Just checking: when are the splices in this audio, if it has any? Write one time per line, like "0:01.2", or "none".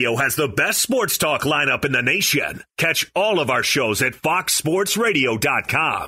none